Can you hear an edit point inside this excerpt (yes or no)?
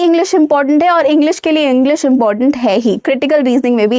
no